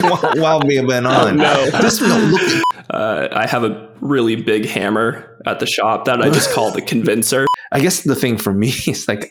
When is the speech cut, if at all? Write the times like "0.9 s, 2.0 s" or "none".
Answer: 2.7 s, 7.6 s

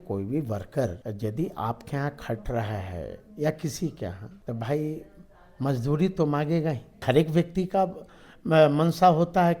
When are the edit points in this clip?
1.0 s, 4.3 s, 7.0 s

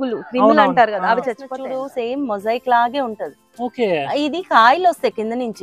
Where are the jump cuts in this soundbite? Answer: 1.6 s

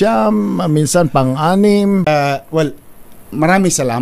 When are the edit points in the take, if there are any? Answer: 2.1 s

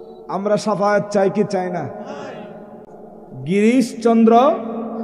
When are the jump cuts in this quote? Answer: 2.8 s

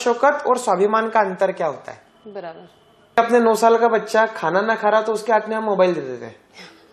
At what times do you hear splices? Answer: 3.2 s

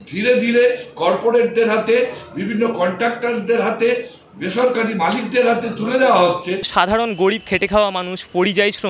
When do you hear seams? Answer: 6.6 s

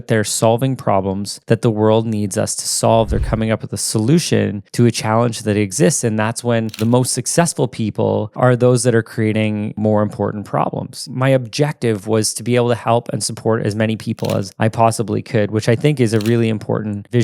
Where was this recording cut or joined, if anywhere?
6.8 s, 9.7 s, 11.0 s

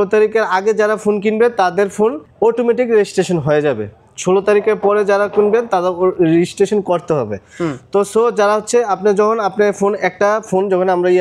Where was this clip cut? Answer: none

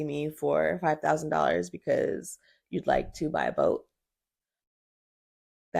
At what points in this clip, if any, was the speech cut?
none

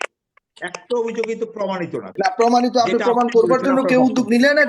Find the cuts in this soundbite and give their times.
2.1 s

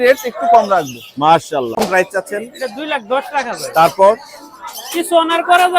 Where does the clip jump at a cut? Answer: 1.8 s

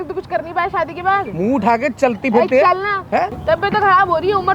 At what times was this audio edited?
3.4 s

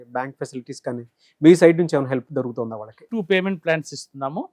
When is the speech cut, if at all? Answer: 3.0 s

